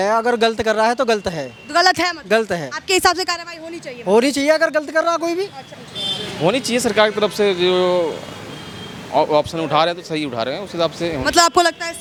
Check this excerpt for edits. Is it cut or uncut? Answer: uncut